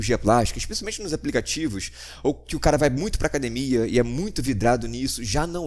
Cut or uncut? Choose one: uncut